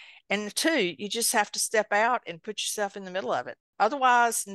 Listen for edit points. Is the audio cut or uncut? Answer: cut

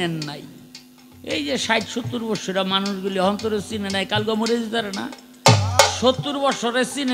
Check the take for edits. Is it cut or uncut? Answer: uncut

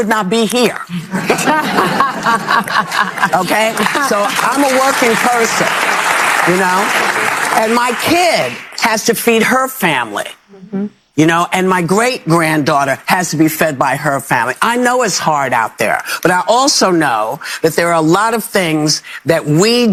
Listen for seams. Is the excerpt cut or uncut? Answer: uncut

